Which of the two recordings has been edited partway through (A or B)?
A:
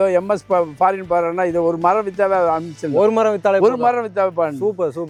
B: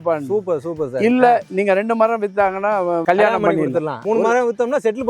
B